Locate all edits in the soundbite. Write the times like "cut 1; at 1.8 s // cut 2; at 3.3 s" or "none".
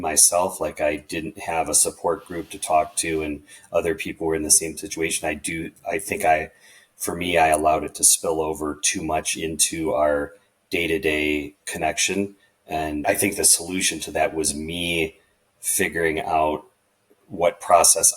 cut 1; at 13.0 s